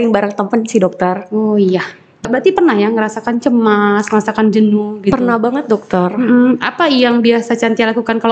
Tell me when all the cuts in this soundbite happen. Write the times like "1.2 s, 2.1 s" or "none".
2.2 s